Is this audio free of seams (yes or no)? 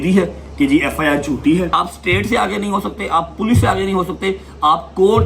no